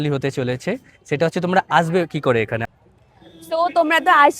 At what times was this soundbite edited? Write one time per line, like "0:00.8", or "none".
0:02.6